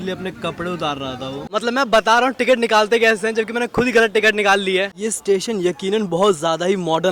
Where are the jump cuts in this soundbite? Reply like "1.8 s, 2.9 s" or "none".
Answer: 1.5 s, 4.9 s